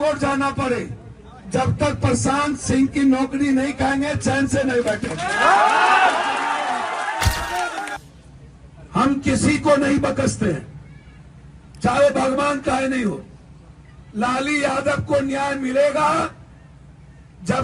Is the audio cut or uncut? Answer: cut